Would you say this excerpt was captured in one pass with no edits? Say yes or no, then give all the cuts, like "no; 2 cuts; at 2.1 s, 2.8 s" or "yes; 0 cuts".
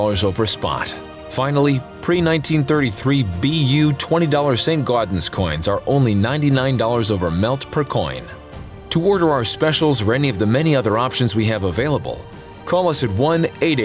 yes; 0 cuts